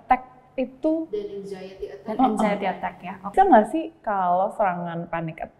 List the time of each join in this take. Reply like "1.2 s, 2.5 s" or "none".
3.3 s